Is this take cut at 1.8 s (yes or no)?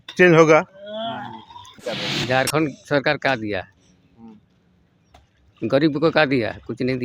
yes